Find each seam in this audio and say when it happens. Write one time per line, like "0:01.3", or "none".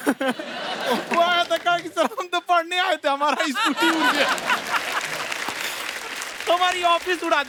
none